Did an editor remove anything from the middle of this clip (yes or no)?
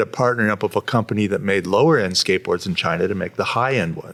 no